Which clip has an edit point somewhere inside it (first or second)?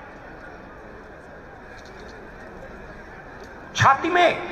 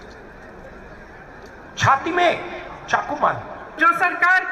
second